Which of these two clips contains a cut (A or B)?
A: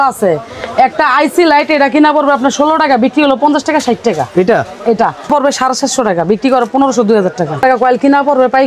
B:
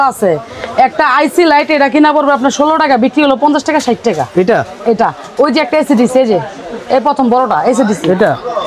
A